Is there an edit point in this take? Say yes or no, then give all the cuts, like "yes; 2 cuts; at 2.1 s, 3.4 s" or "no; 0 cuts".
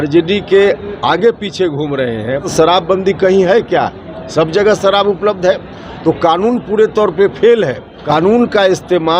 yes; 2 cuts; at 2.5 s, 7.9 s